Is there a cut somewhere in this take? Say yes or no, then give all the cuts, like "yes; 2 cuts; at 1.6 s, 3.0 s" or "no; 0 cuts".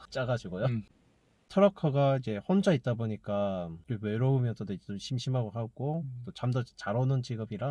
yes; 1 cut; at 0.9 s